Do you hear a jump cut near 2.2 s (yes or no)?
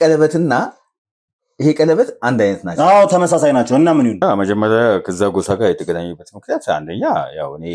no